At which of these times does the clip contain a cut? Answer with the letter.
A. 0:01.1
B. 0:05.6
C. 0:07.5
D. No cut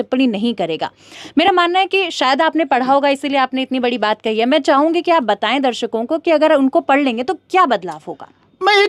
D